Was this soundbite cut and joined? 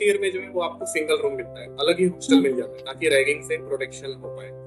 no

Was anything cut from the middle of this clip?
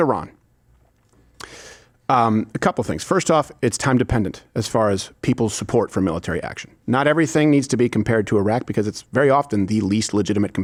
no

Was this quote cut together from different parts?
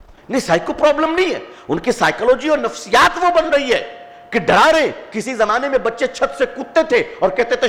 no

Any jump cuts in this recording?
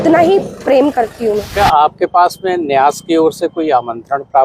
yes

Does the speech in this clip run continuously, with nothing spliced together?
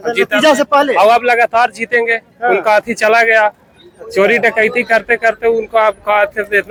yes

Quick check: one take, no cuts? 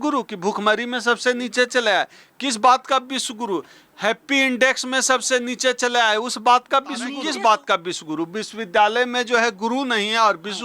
no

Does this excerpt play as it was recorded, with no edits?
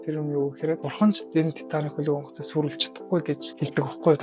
yes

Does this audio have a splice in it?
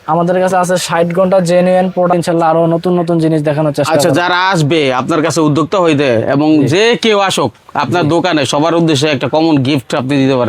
yes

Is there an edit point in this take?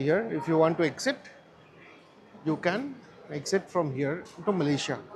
no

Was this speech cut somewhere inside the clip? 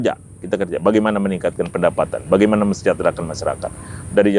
no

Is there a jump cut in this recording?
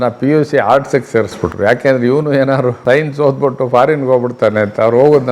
yes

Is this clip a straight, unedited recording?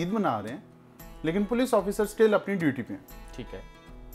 yes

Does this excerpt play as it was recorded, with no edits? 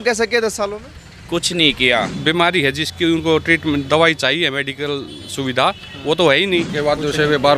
no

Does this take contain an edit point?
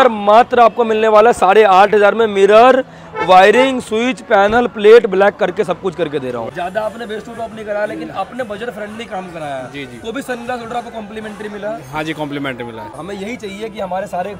yes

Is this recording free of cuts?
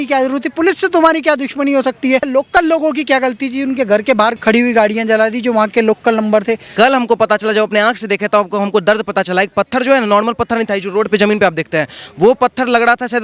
no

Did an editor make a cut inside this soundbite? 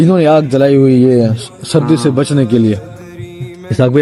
no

